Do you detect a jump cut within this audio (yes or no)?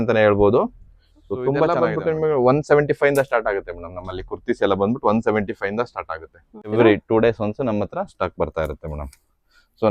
yes